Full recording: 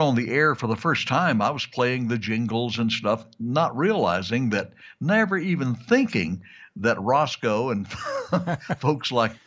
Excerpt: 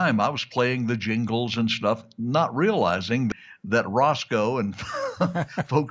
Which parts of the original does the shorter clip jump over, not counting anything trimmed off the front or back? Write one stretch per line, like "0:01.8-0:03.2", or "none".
0:04.7-0:06.6

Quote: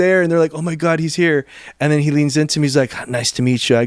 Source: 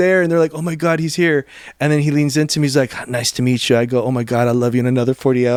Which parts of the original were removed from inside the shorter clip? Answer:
none

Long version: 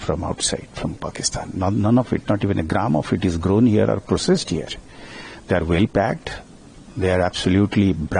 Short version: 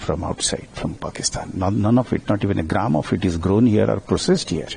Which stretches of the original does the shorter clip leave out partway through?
none

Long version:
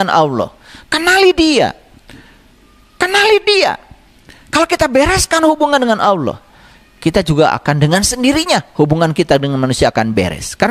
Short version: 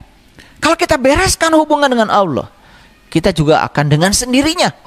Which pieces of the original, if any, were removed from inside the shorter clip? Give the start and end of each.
none

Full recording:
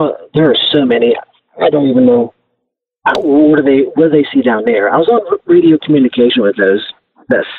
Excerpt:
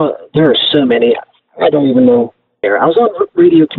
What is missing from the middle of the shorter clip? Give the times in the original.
0:02.7-0:04.8

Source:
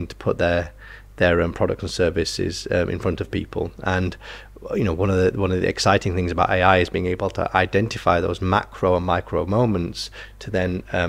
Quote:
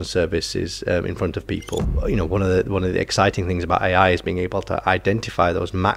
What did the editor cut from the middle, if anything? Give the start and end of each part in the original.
0:03.7-0:04.6

